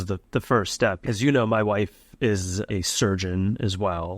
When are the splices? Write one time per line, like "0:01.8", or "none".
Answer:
0:01.0